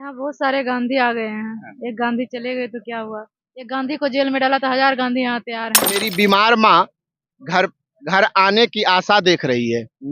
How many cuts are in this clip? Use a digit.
1